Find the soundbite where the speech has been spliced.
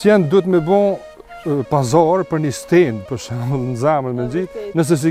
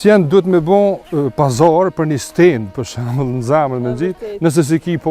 second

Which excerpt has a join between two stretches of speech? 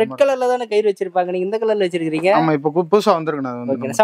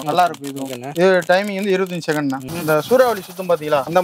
second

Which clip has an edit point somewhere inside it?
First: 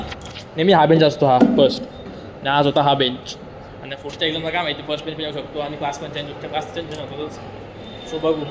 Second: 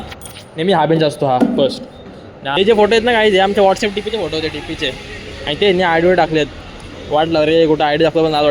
second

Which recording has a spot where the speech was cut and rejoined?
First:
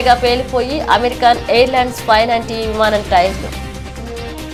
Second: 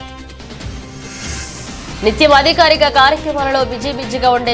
second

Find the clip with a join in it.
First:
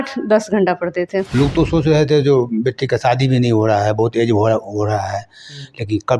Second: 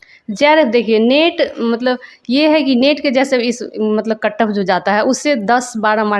first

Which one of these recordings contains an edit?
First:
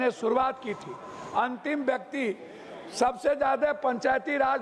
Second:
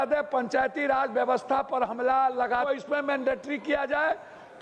second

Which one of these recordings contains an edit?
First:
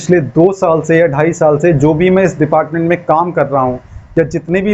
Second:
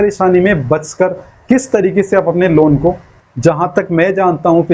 second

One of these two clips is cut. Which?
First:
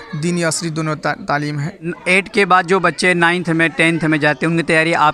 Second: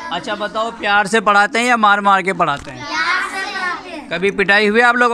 first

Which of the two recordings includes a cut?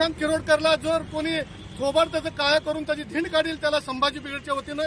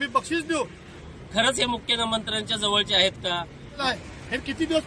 second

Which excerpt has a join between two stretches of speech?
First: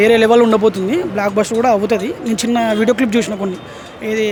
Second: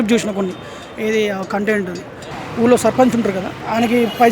second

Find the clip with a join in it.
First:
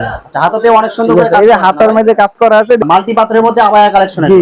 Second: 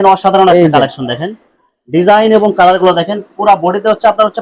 first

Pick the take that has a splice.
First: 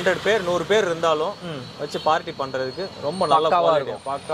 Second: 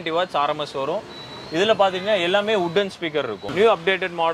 second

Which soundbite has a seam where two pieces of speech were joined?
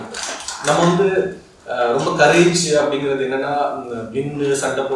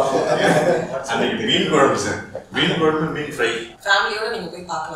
second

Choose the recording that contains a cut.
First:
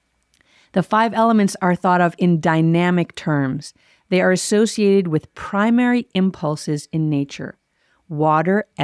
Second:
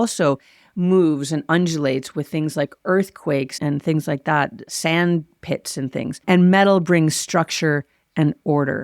second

